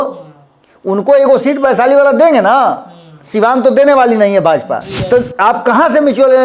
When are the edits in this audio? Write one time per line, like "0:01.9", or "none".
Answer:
0:04.9